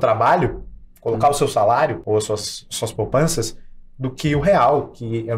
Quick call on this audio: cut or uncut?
cut